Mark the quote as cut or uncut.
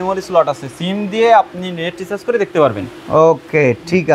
uncut